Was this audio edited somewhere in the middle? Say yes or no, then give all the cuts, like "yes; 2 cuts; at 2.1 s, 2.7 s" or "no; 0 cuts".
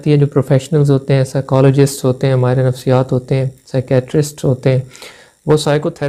no; 0 cuts